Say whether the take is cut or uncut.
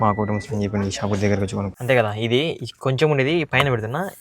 cut